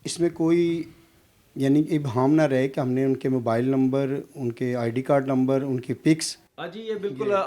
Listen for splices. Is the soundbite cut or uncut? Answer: uncut